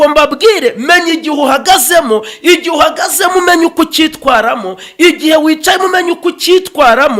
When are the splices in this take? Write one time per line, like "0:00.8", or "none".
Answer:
none